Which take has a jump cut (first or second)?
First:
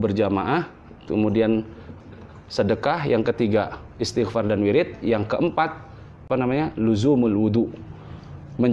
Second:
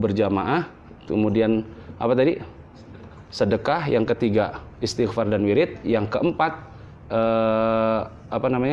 first